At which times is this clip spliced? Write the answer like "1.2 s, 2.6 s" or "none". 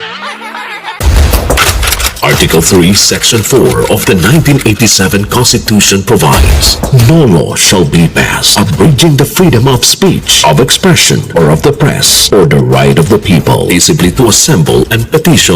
1.0 s